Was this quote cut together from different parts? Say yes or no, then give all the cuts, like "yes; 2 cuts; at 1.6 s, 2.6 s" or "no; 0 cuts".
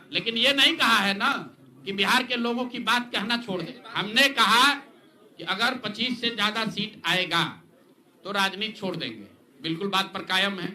yes; 1 cut; at 3.7 s